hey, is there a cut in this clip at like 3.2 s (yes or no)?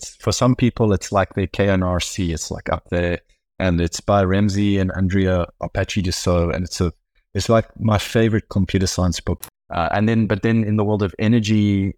no